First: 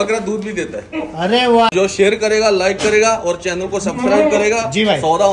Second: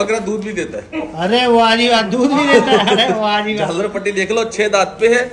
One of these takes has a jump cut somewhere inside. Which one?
first; 1 cut; at 1.7 s

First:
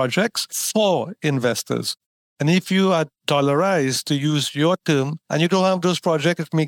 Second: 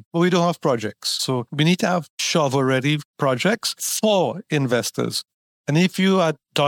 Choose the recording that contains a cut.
second; 2 cuts; at 1.2 s, 2.2 s

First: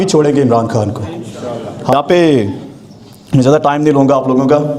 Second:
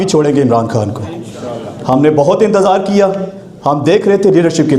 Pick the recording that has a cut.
first; 1 cut; at 1.9 s

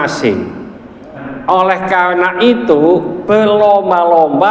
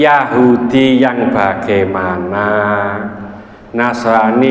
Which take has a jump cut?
first; 1 cut; at 1.3 s

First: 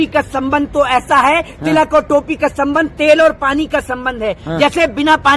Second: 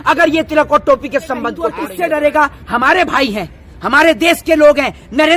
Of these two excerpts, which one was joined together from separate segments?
second; 1 cut; at 1.8 s

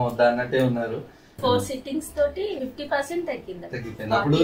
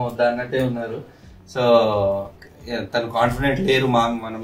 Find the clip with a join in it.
first; 2 cuts; at 1.4 s, 2.6 s

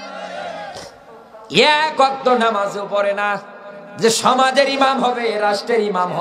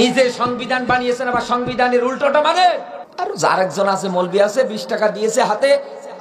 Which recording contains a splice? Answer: second; 1 cut; at 3.0 s

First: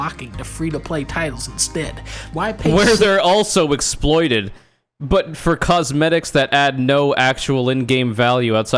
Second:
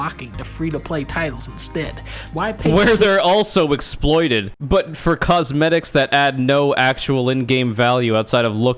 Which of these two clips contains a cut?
second; 1 cut; at 4.5 s

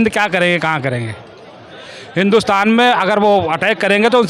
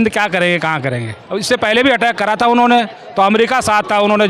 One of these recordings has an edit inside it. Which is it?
second; 1 cut; at 1.2 s

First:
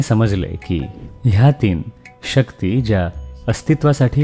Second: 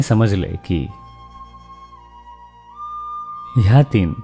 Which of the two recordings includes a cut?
first; 1 cut; at 1.0 s

